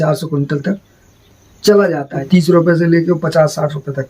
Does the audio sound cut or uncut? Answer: cut